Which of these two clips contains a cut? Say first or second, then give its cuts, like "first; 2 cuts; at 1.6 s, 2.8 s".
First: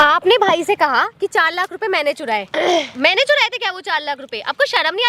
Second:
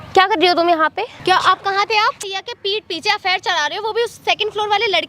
second; 2 cuts; at 1.1 s, 2.4 s